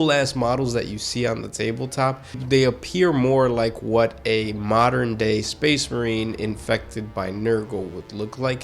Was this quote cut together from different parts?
yes; 1 cut; at 2.4 s

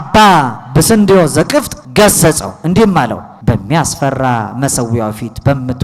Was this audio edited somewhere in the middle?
yes; 2 cuts; at 1.8 s, 3.3 s

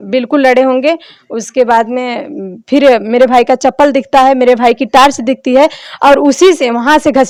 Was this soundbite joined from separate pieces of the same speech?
no; 0 cuts

